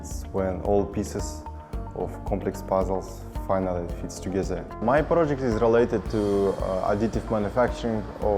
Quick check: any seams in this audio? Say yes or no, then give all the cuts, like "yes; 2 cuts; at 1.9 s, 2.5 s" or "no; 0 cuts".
yes; 1 cut; at 4.7 s